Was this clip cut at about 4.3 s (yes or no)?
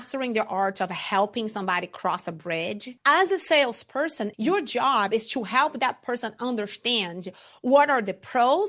yes